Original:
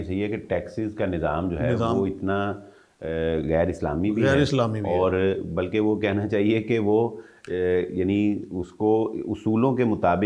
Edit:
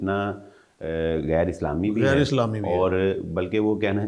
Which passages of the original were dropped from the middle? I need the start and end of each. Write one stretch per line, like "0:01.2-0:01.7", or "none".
none